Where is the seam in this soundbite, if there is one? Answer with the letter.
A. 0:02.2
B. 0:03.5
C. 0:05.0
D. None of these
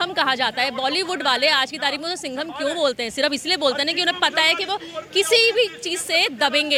D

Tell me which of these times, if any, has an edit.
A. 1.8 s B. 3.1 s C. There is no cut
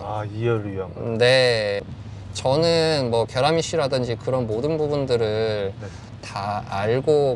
A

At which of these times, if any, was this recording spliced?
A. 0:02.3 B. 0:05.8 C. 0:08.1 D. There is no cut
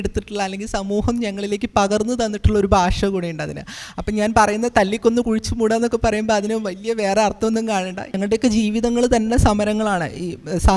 C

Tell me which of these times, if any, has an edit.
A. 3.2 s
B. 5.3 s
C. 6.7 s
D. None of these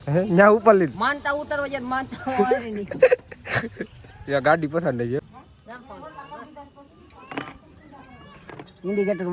B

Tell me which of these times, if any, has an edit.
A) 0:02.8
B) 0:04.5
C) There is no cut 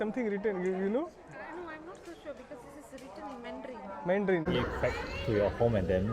B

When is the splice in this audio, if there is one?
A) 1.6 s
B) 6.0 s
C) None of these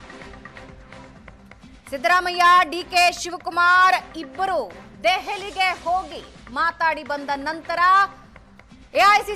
A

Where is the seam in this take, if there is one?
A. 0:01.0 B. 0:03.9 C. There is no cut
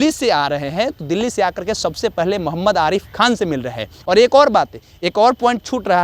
C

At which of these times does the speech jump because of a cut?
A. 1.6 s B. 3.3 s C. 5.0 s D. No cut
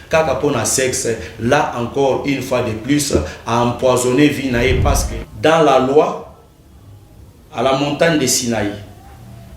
C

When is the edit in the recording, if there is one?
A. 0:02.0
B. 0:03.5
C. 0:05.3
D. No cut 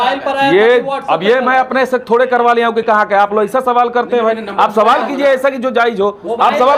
D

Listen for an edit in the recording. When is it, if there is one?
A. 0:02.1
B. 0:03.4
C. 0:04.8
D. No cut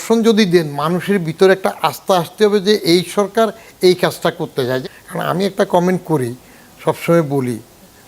C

